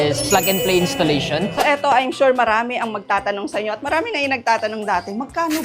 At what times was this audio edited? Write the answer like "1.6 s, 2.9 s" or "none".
1.5 s